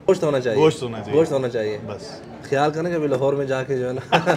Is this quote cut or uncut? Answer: uncut